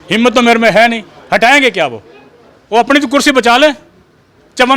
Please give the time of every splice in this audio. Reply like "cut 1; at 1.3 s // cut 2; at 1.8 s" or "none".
none